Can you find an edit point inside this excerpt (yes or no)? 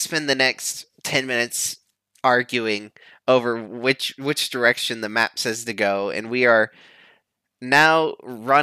no